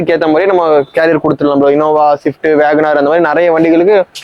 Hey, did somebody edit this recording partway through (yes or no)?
no